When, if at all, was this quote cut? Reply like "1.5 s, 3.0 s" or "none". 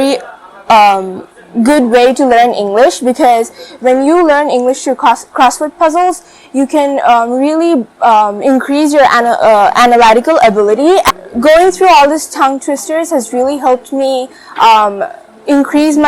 11.1 s